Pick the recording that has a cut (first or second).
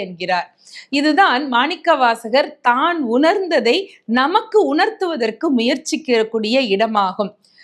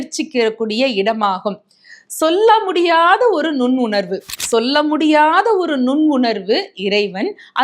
second